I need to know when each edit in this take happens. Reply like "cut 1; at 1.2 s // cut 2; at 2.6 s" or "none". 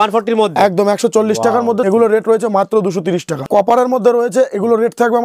cut 1; at 1.8 s // cut 2; at 3.4 s